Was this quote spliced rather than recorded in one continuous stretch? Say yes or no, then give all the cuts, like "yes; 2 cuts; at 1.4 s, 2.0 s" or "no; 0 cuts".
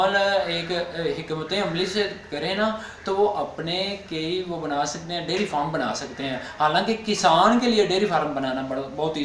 no; 0 cuts